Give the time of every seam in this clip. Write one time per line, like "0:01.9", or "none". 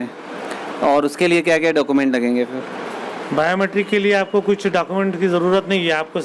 none